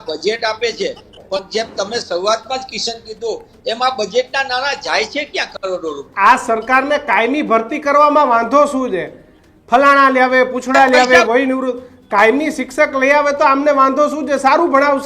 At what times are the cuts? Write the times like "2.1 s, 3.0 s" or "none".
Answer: 6.0 s